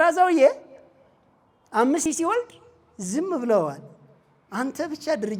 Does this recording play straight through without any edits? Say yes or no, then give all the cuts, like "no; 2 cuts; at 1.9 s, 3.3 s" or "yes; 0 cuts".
no; 1 cut; at 2.1 s